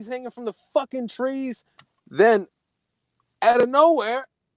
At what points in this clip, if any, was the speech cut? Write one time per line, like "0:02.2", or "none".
0:01.7